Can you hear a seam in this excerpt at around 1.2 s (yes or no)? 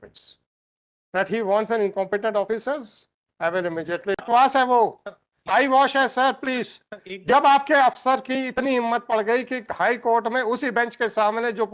no